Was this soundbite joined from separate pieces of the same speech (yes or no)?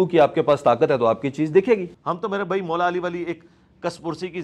yes